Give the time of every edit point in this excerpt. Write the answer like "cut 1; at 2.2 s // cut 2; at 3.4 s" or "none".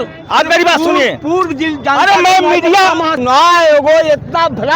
cut 1; at 3.1 s